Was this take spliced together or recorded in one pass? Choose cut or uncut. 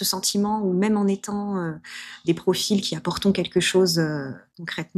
uncut